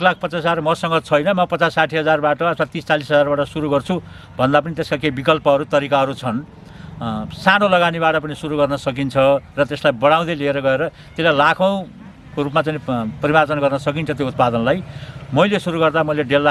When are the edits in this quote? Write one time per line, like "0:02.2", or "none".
none